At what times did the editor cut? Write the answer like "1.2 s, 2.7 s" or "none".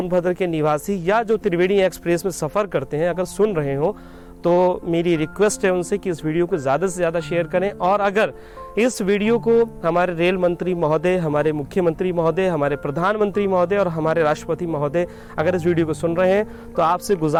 none